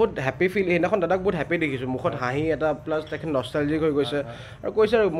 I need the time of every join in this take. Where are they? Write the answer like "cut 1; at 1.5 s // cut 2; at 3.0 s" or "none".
none